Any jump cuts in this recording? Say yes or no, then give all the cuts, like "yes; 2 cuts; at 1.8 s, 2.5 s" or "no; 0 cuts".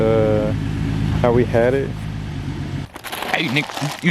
yes; 1 cut; at 2.8 s